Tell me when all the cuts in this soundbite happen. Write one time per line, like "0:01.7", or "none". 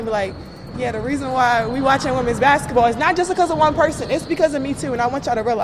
none

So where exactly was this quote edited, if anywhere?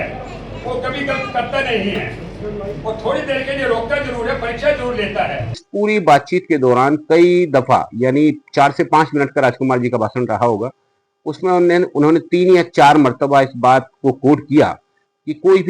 0:05.6

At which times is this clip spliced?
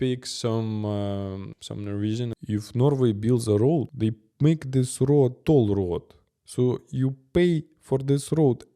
0:01.5
0:02.4
0:03.9

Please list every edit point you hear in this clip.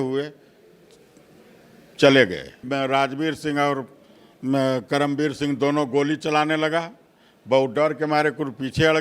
0:02.6

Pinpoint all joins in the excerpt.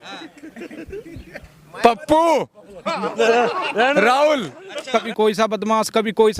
0:04.9

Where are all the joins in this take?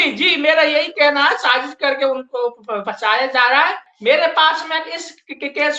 0:03.9

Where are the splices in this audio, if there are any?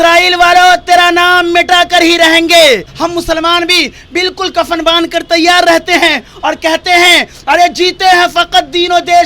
0:02.9

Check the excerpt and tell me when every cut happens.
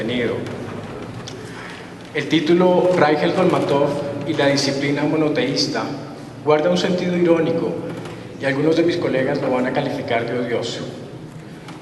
none

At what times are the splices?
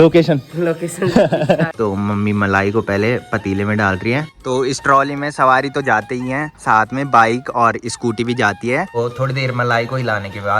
0:01.7
0:04.3
0:08.9

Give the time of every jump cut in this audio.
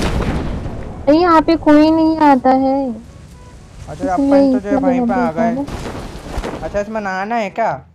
0:06.6

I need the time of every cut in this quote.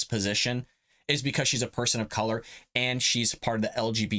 none

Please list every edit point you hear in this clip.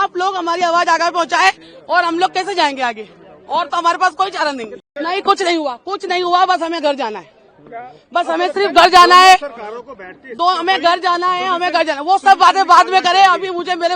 0:04.8

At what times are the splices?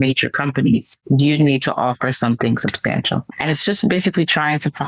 0:00.9
0:03.2

